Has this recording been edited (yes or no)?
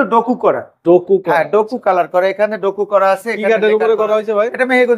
no